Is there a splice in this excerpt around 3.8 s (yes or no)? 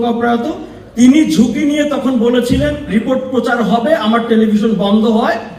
no